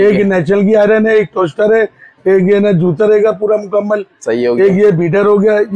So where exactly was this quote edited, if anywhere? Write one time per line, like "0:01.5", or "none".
none